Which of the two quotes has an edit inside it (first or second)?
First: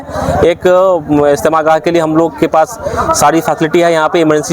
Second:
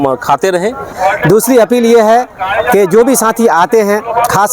second